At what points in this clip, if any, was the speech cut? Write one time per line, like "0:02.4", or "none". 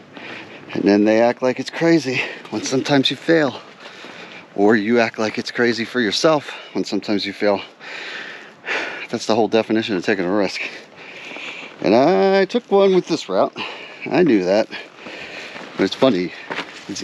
none